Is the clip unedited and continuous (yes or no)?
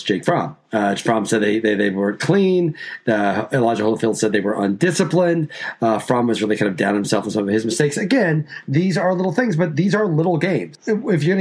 yes